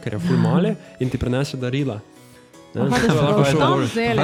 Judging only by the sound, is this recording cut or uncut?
uncut